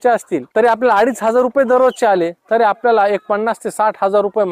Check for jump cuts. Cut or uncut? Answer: uncut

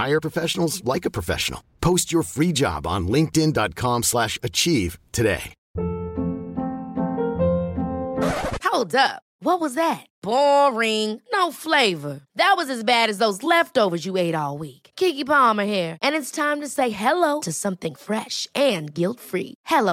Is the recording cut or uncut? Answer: cut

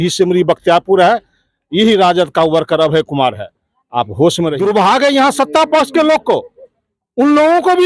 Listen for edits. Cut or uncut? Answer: cut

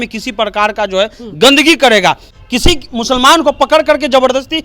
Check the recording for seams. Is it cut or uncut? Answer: cut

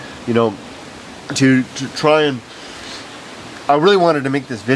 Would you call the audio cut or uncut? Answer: cut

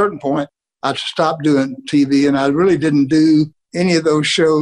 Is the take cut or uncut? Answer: uncut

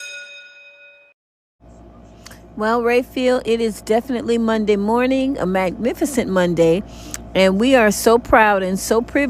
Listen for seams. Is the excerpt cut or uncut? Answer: cut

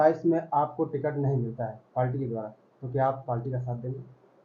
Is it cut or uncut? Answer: uncut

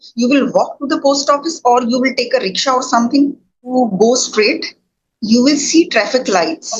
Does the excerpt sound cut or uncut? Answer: cut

